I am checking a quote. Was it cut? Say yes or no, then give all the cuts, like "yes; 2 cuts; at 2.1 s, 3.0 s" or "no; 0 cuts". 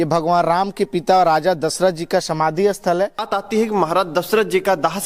yes; 1 cut; at 3.3 s